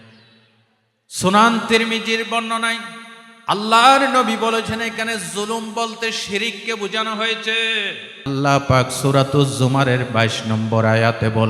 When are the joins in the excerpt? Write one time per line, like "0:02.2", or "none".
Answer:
0:08.3